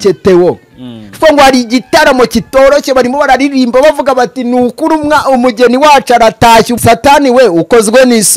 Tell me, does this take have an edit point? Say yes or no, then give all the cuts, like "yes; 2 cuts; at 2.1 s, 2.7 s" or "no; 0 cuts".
yes; 1 cut; at 6.7 s